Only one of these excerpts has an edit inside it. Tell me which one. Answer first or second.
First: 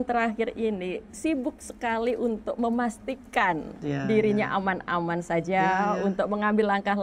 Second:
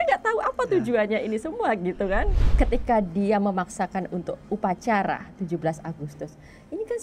second